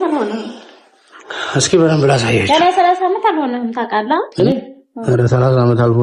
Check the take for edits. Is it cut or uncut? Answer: cut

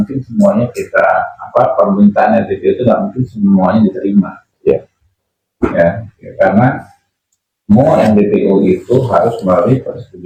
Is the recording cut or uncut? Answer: uncut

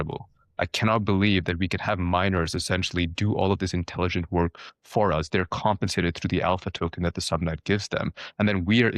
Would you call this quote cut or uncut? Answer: uncut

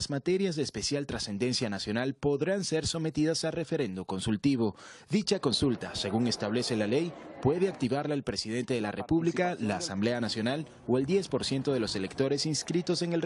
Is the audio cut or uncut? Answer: cut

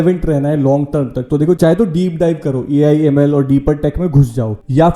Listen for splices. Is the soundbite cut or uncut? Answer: uncut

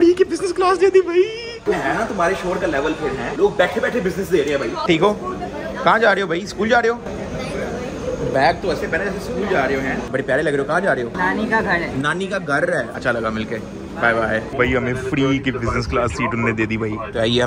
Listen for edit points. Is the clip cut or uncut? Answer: uncut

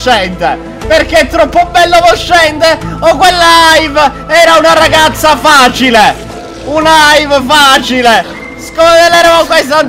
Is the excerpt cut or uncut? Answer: uncut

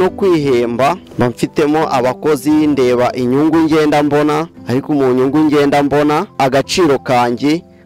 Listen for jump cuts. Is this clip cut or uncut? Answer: cut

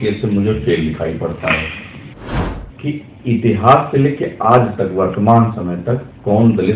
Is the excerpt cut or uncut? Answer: cut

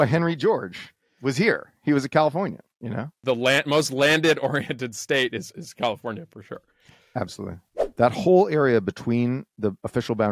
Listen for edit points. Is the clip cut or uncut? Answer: cut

